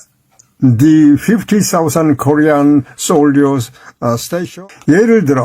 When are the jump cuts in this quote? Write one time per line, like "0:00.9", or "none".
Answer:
0:04.4